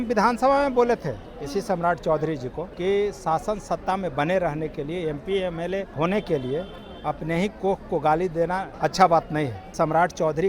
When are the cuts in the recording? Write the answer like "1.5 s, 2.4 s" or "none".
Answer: 2.7 s, 5.9 s, 8.7 s, 9.7 s